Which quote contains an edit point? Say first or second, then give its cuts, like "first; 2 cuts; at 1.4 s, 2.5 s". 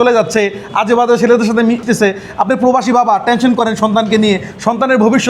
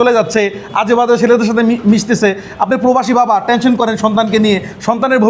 first; 1 cut; at 1.8 s